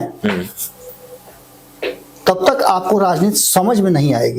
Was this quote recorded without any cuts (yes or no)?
yes